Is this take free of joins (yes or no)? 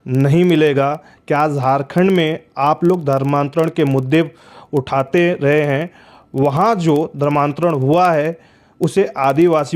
yes